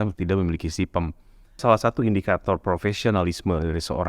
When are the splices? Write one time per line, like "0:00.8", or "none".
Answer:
0:01.6